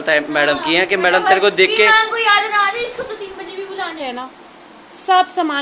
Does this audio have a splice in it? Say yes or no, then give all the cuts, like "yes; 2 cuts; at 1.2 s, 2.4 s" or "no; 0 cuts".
yes; 1 cut; at 4.0 s